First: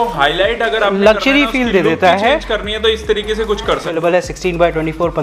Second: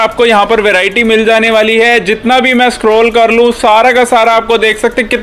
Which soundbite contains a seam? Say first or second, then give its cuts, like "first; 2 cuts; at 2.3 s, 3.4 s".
first; 1 cut; at 3.9 s